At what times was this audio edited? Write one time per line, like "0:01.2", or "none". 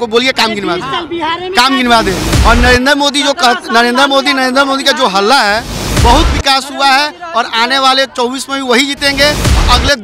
none